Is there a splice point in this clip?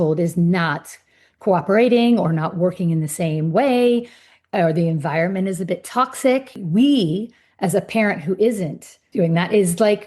yes; 2 cuts; at 6.5 s, 9.0 s

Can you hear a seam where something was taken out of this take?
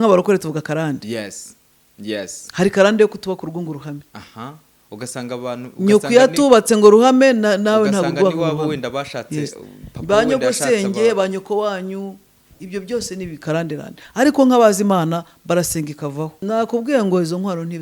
yes; 1 cut; at 16.4 s

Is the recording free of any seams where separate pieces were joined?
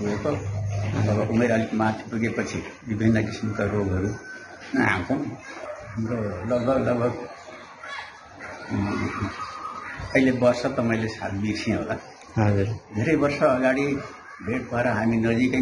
no; 1 cut; at 5.6 s

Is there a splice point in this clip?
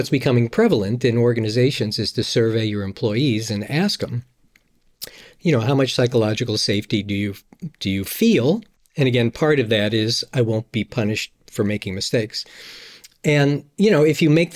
no; 0 cuts

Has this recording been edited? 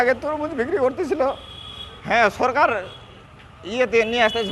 no; 0 cuts

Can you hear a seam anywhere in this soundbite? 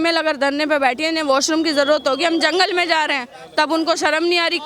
no; 0 cuts

